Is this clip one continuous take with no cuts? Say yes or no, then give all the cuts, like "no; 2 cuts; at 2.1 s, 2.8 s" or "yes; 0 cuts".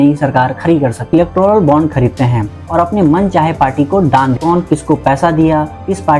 no; 2 cuts; at 1.1 s, 4.4 s